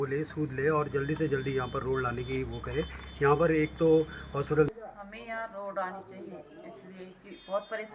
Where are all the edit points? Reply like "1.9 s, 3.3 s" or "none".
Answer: 4.7 s